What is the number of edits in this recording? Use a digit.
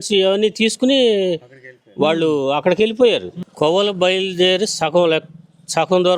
1